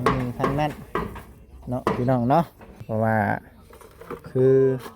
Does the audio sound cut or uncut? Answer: cut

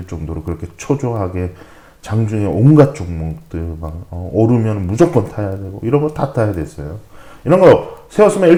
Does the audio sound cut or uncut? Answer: uncut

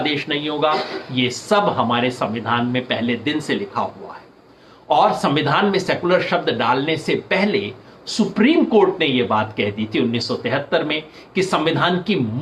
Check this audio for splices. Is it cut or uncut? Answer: uncut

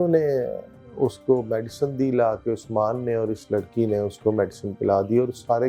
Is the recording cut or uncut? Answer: uncut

